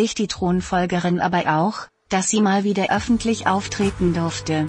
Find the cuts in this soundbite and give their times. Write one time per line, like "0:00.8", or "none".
none

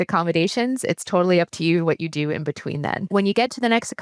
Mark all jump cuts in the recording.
0:03.0

